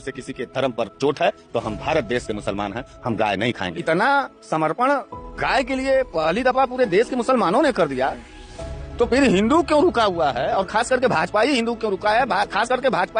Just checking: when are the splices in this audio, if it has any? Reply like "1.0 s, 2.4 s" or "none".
none